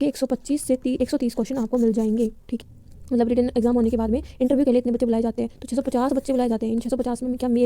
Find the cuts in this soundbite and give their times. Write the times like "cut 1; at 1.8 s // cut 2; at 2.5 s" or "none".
cut 1; at 2.5 s